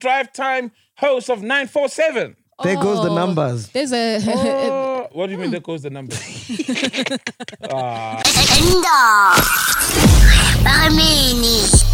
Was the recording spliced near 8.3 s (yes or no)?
yes